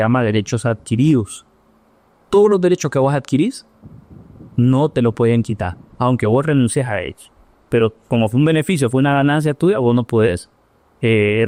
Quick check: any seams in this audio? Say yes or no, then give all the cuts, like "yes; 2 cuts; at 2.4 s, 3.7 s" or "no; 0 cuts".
no; 0 cuts